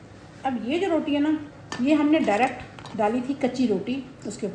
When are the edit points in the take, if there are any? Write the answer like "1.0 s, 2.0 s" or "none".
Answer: 1.6 s